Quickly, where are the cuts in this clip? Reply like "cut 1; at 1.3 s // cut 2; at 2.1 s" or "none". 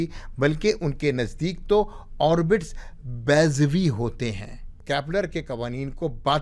cut 1; at 4.8 s